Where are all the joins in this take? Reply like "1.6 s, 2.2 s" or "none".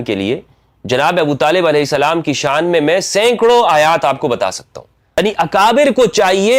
5.2 s

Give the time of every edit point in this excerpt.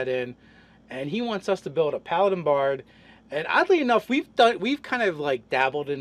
3.7 s

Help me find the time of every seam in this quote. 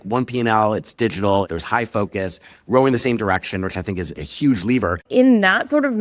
1.5 s, 4.3 s, 5.0 s

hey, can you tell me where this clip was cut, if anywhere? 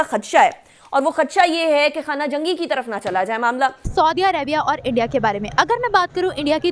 3.9 s

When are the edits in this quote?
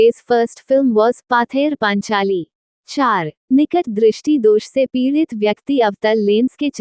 3.0 s

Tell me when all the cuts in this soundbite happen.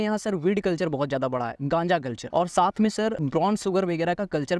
2.2 s, 3.2 s

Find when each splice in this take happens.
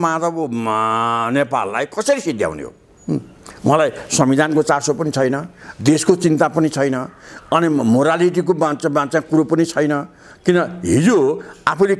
none

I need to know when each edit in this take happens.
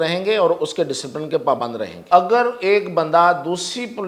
1.9 s

